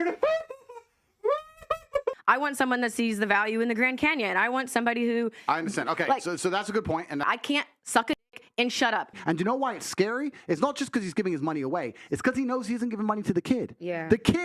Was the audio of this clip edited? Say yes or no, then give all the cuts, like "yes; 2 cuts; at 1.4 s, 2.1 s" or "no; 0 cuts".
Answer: yes; 3 cuts; at 2.2 s, 7.2 s, 9.1 s